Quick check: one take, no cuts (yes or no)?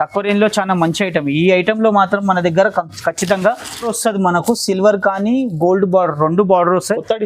no